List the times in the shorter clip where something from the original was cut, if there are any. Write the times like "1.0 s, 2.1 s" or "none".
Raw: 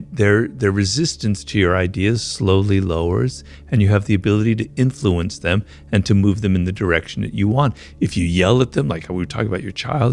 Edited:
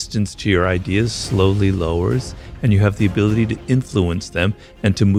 none

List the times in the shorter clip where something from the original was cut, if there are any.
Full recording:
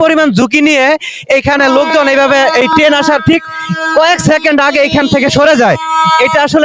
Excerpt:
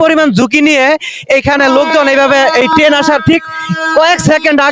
none

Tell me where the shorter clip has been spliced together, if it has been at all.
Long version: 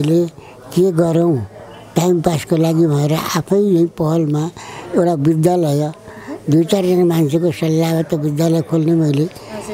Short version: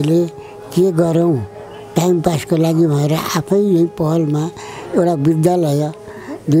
none

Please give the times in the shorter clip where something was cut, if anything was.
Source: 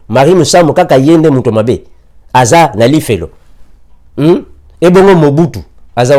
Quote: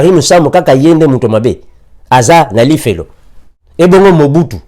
3.6 s

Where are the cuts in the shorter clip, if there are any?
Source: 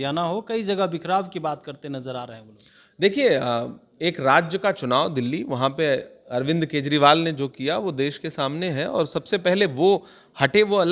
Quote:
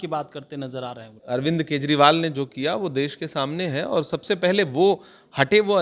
1.1 s

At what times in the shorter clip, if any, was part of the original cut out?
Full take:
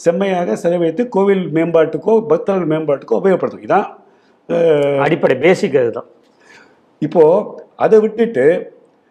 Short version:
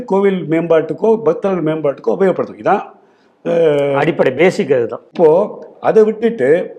5.0 s

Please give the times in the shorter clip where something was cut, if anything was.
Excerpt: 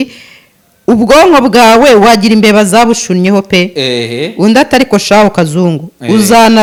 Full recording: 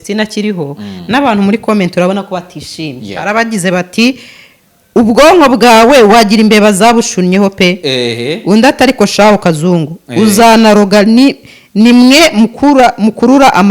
none

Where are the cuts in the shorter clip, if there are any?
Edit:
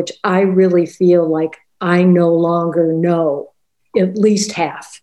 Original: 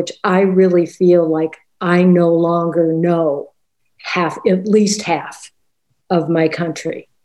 3.8 s

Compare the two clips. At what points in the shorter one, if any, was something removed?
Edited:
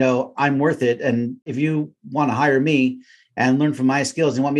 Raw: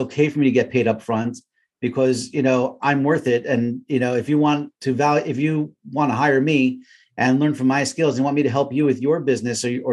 1.4 s

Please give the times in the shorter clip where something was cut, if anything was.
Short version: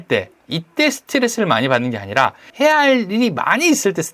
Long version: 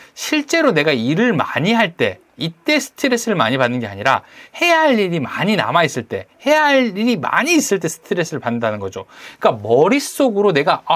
2.4 s

